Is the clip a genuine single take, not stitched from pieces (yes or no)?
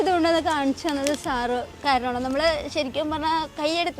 no